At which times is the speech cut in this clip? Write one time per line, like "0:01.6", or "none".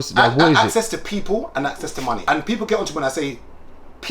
0:02.2